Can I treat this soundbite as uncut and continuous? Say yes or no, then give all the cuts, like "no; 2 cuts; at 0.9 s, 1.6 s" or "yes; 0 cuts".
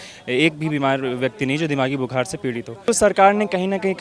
no; 1 cut; at 2.9 s